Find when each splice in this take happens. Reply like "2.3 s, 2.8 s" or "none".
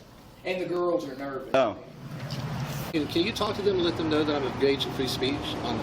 2.8 s